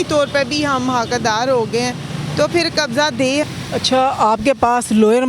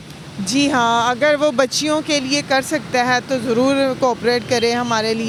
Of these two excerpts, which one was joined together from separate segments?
first; 1 cut; at 3.5 s

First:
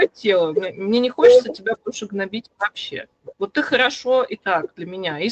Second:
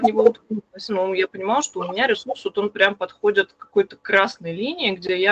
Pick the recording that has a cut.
second; 1 cut; at 0.9 s

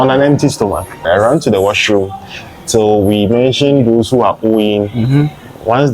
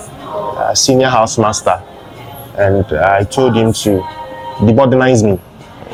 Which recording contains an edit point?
first; 1 cut; at 1.0 s

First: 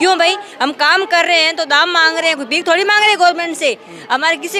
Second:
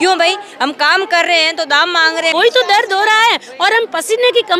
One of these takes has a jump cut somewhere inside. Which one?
second; 1 cut; at 2.3 s

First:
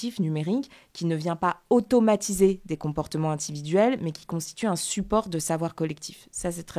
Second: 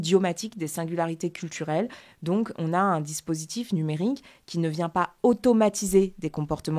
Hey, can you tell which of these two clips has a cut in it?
second; 1 cut; at 2.1 s

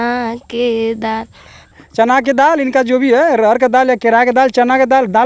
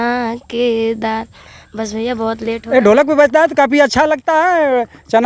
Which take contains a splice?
first; 1 cut; at 1.8 s

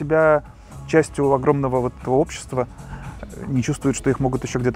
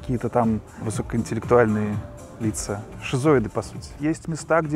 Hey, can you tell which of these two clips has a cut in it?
second; 2 cuts; at 2.9 s, 3.8 s

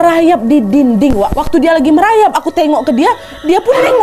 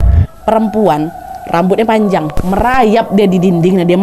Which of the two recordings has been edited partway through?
second; 1 cut; at 2.4 s

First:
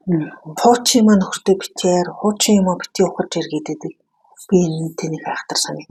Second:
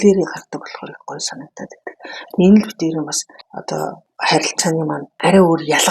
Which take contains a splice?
second; 2 cuts; at 3.8 s, 5.1 s

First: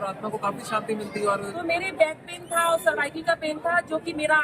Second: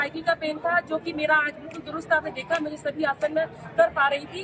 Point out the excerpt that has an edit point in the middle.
first; 1 cut; at 1.5 s

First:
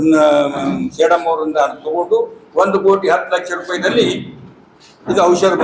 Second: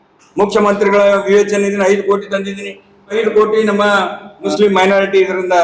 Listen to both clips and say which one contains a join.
second; 2 cuts; at 3.1 s, 4.5 s

